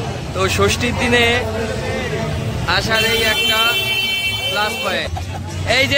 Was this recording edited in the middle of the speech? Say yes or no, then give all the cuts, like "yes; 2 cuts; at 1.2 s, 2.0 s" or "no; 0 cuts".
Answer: yes; 1 cut; at 5.1 s